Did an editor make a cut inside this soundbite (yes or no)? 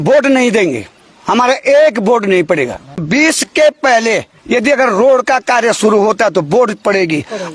yes